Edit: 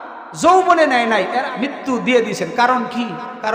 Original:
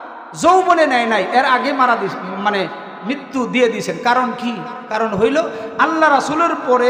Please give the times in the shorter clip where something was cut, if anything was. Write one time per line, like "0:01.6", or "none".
0:01.4